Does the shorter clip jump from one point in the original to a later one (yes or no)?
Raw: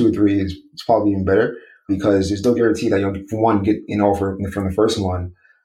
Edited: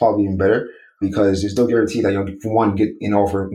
no